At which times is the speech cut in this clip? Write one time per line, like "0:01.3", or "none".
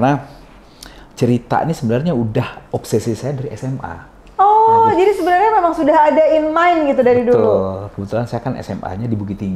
none